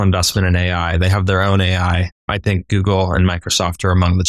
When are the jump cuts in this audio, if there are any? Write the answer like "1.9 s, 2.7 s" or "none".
2.1 s